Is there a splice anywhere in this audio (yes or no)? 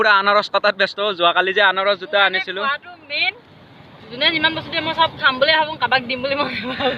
no